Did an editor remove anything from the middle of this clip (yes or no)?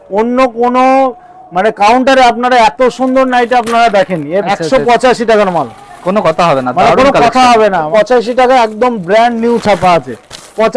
yes